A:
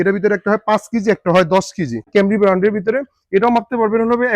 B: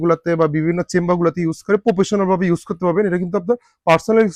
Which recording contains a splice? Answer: A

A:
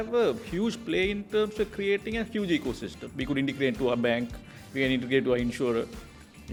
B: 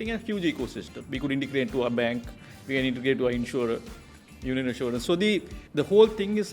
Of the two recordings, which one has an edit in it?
B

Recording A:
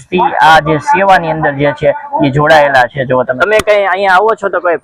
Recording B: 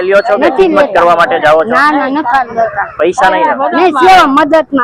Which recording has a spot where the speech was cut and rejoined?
A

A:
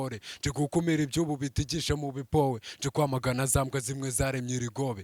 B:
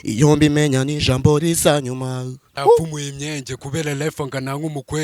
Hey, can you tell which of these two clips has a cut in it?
B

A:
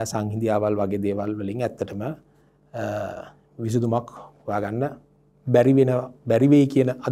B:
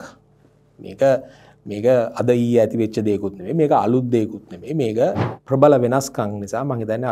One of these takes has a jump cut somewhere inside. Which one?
B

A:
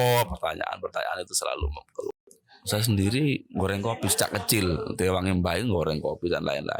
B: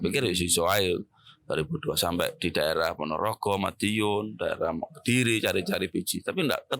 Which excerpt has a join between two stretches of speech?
A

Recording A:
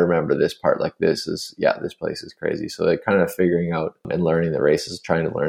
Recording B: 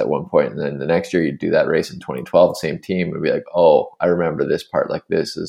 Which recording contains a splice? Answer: A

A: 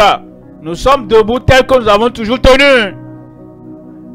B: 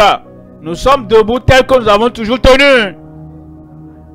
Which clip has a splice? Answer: A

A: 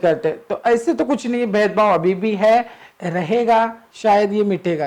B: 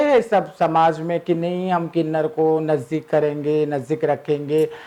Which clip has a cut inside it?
A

